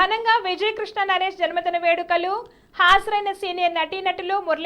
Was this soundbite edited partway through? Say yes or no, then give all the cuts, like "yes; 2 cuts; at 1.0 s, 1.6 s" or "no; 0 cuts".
no; 0 cuts